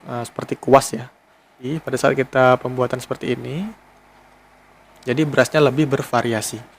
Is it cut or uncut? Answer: cut